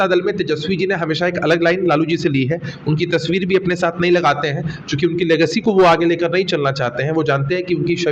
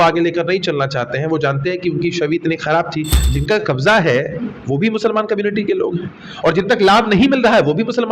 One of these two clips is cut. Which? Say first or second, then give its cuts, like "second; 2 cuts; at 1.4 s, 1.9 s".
second; 1 cut; at 3.2 s